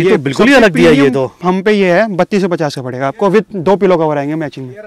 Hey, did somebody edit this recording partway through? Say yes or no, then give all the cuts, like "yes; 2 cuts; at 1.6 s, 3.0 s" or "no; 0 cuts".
no; 0 cuts